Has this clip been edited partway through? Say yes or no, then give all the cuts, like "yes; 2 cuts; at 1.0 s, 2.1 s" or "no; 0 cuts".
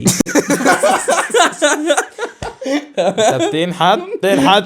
no; 0 cuts